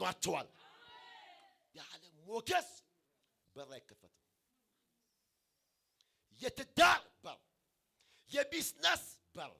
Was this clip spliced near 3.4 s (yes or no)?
no